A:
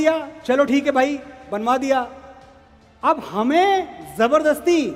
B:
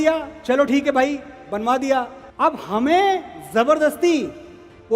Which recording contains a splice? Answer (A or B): B